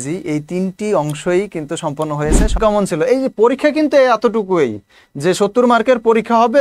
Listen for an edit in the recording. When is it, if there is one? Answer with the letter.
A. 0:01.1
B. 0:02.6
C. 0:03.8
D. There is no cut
B